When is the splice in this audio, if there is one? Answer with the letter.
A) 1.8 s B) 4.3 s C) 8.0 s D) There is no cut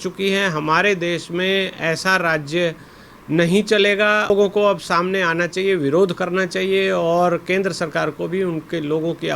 B